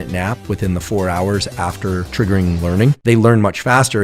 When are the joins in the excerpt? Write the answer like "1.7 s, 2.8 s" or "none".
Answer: 3.0 s